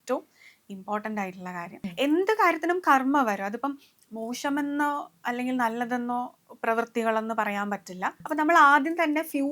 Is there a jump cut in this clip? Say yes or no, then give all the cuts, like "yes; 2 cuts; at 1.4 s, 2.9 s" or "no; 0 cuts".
yes; 2 cuts; at 1.8 s, 8.2 s